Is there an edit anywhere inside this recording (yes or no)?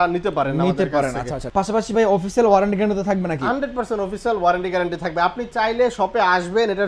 yes